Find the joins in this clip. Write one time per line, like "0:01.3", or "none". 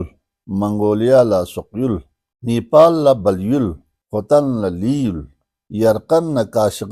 none